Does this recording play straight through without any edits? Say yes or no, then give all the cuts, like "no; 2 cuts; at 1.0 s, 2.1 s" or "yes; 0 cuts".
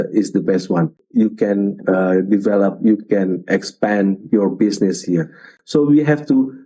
no; 2 cuts; at 1.0 s, 5.5 s